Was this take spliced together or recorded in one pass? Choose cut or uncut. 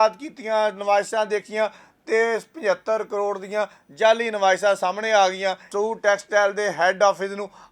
cut